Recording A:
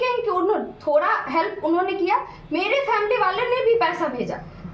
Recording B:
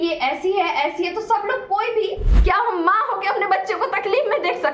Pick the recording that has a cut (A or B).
B